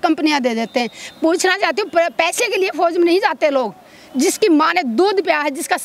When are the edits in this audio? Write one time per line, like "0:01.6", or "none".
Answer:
none

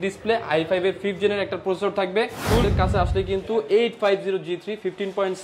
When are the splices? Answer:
0:02.7

